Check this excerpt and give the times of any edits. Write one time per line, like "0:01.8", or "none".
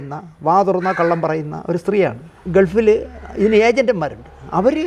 0:02.3